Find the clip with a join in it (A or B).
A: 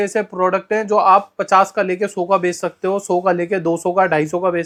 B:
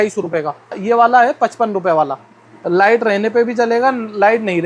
B